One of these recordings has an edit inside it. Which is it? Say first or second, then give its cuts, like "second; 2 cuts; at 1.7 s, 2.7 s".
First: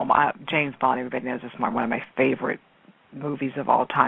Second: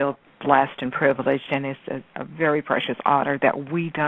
second; 1 cut; at 3.0 s